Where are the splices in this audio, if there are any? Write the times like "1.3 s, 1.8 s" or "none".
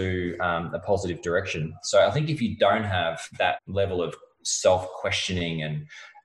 1.8 s, 3.6 s